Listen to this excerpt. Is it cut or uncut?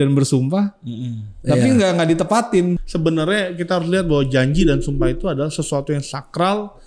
cut